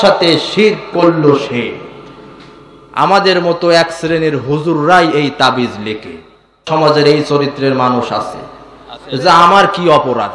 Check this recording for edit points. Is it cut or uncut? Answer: cut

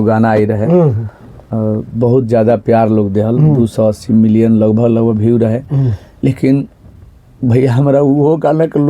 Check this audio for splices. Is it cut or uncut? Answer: uncut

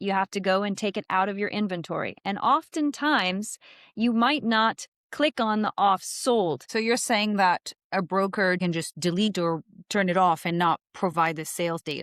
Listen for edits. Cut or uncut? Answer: cut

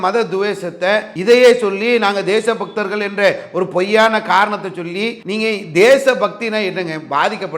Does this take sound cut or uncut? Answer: cut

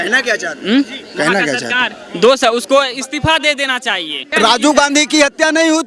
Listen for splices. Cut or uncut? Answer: cut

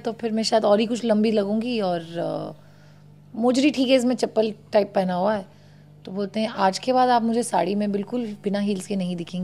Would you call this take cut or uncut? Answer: uncut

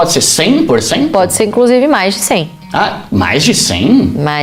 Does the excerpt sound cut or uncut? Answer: uncut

